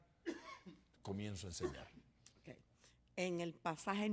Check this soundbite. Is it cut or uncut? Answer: cut